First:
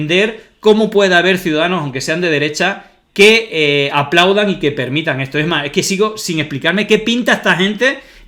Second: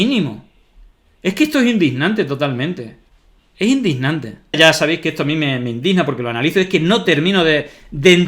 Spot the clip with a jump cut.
second; 1 cut; at 4.5 s

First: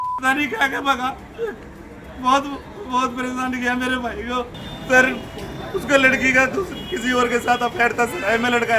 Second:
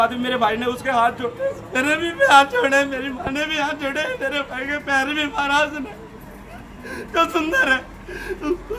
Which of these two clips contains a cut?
first; 1 cut; at 4.5 s

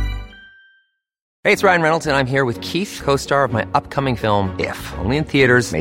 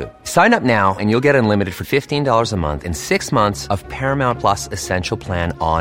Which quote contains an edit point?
first; 1 cut; at 1.2 s

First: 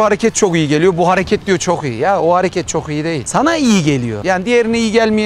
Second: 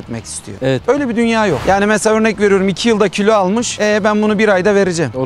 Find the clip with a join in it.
second; 1 cut; at 1.6 s

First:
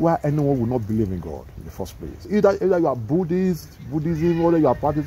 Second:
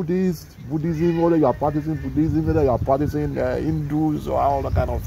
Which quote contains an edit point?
first; 1 cut; at 2.2 s

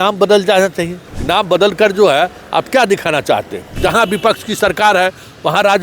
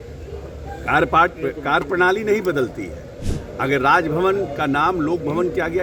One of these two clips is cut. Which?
first; 2 cuts; at 1.0 s, 3.8 s

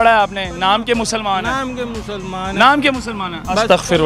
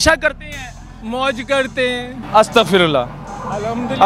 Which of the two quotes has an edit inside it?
second; 1 cut; at 2.2 s

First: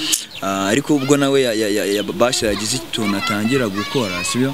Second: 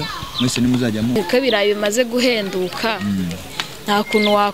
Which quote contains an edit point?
second; 1 cut; at 1.2 s

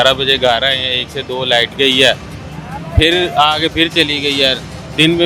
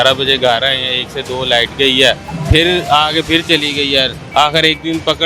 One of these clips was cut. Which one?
second; 2 cuts; at 2.3 s, 4.2 s

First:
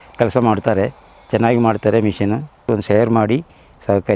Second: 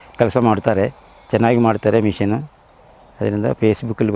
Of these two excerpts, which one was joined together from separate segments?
first; 1 cut; at 2.7 s

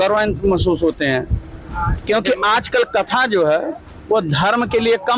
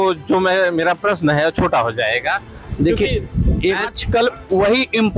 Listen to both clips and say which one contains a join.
second; 1 cut; at 3.9 s

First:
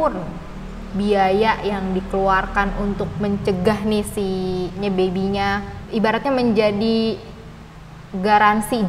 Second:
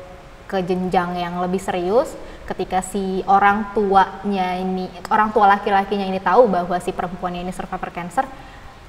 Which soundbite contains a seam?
first; 2 cuts; at 4.8 s, 5.8 s

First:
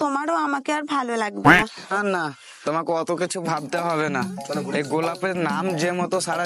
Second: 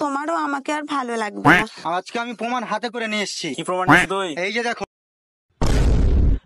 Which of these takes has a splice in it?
second; 1 cut; at 1.8 s

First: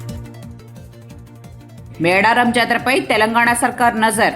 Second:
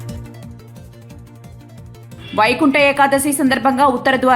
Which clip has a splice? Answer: first; 1 cut; at 1.7 s

